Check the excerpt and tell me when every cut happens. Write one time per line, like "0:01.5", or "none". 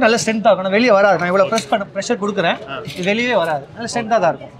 none